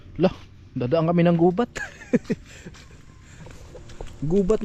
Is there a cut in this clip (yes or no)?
no